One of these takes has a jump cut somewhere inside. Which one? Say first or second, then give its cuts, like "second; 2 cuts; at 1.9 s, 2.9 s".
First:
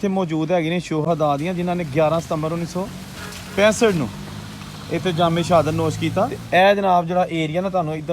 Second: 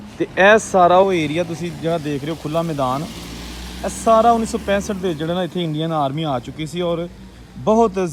first; 2 cuts; at 1.0 s, 6.4 s